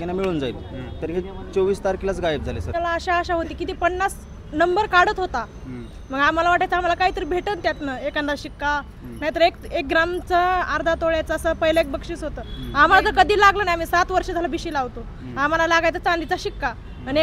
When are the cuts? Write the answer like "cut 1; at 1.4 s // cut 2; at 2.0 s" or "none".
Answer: cut 1; at 2.7 s